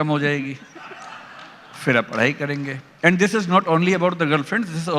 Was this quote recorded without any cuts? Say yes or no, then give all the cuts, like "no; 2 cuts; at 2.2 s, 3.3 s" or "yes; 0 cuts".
yes; 0 cuts